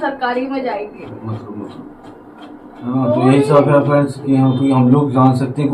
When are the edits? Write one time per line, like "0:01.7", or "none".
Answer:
0:01.1

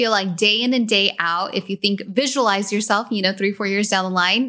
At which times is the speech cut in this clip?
none

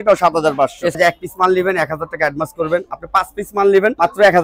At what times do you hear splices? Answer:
0:01.0

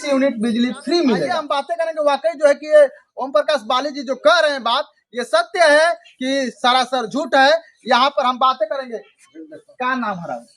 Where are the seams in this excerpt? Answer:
0:01.4

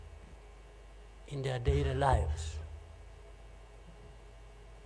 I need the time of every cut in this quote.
none

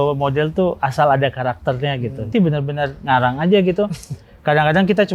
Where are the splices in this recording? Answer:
0:02.3

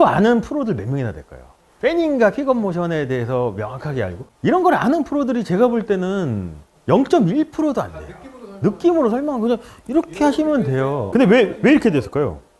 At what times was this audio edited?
0:04.2
0:11.0

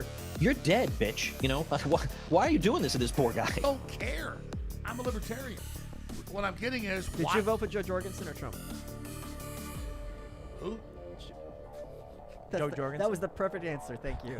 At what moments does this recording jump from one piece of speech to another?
0:03.5

